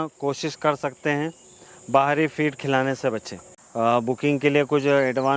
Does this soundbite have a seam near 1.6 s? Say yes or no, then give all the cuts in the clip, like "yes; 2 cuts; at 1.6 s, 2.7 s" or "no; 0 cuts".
no; 1 cut; at 3.5 s